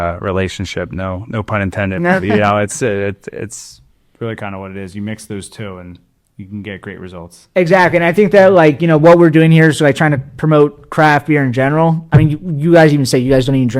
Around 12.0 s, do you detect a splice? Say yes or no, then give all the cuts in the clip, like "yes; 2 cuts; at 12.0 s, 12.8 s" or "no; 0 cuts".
yes; 1 cut; at 12.0 s